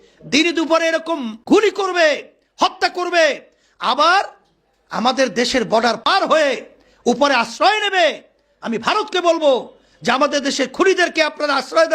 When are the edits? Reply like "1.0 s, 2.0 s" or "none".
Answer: 1.3 s, 6.1 s